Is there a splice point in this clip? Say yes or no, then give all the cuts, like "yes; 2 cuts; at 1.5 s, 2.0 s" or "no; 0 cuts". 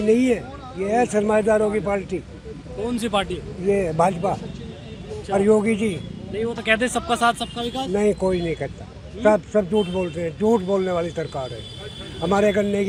no; 0 cuts